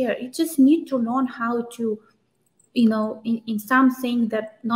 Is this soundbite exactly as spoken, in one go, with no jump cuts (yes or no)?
yes